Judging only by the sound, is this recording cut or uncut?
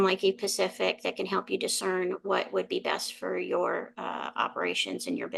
uncut